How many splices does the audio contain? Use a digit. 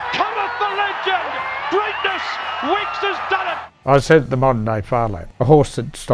2